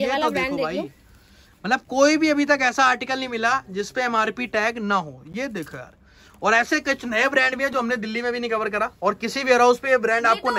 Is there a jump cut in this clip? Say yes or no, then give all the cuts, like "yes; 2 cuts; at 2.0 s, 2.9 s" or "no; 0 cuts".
no; 0 cuts